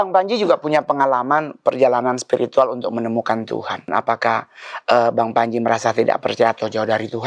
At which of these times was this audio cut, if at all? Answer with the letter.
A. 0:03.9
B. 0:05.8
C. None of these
A